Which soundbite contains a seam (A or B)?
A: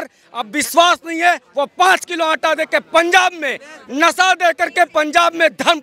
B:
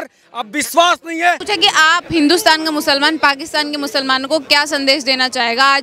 B